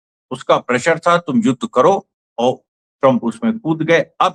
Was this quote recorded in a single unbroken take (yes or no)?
yes